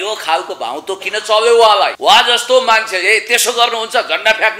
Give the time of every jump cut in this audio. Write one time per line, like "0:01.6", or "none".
0:01.9